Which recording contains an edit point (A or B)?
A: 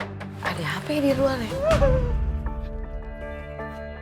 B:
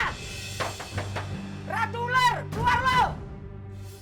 A